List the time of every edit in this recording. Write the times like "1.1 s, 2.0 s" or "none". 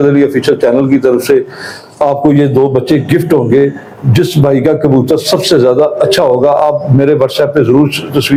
none

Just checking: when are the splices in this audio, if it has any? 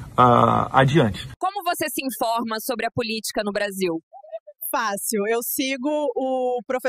1.3 s

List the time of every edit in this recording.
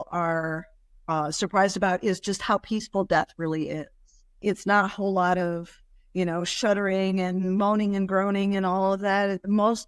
none

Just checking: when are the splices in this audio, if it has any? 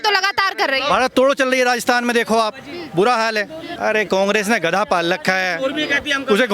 3.6 s

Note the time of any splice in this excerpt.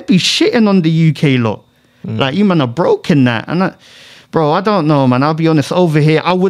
none

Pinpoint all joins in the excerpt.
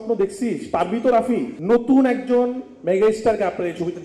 1.5 s

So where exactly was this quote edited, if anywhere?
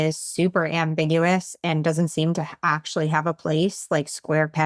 none

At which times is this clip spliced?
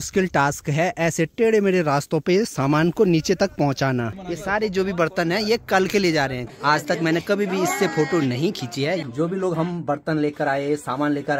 4.2 s, 6.5 s, 9.0 s

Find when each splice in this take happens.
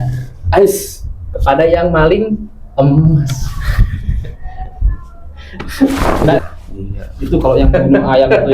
6.4 s

